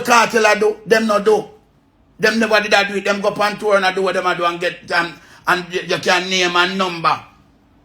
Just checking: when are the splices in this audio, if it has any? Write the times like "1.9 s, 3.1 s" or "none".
none